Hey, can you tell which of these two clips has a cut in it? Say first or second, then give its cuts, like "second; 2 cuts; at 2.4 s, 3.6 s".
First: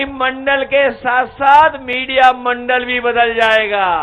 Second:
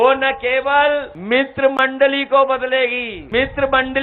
second; 2 cuts; at 1.1 s, 3.1 s